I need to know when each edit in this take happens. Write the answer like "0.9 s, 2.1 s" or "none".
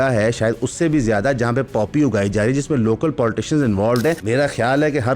4.2 s